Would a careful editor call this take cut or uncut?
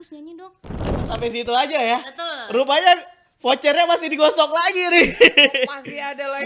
cut